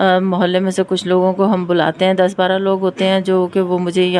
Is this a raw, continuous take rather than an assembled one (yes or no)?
yes